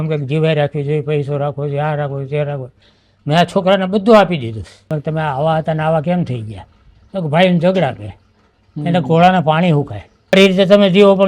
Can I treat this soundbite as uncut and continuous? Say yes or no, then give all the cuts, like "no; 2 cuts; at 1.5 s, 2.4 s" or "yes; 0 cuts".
no; 2 cuts; at 4.9 s, 10.3 s